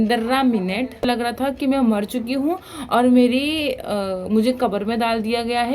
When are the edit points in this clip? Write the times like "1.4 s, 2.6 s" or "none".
1.3 s